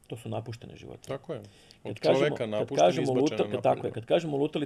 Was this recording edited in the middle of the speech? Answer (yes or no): no